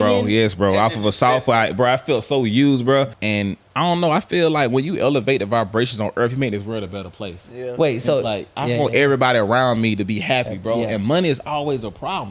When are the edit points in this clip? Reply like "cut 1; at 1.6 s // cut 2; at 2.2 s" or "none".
cut 1; at 3.1 s